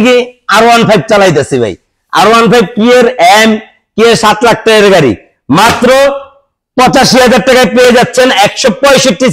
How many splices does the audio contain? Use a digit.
0